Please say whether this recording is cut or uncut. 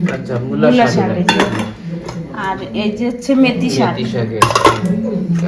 uncut